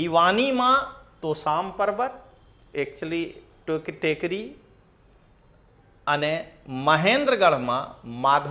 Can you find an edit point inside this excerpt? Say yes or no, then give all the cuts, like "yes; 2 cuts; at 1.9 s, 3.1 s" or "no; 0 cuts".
no; 0 cuts